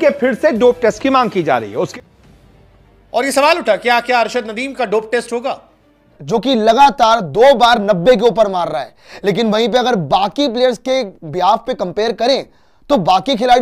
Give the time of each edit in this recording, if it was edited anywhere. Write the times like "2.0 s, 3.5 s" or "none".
1.9 s, 6.2 s